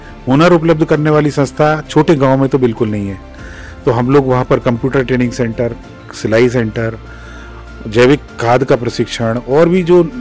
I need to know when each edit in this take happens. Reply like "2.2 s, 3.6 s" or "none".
none